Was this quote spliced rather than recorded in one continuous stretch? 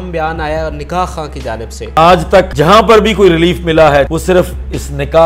yes; 3 cuts; at 1.9 s, 2.5 s, 4.1 s

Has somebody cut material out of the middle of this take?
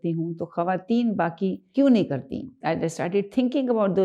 yes; 2 cuts; at 1.6 s, 2.5 s

